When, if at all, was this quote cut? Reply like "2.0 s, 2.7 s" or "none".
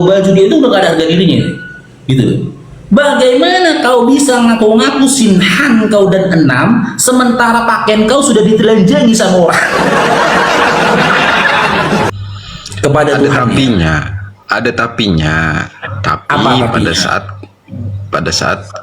12.1 s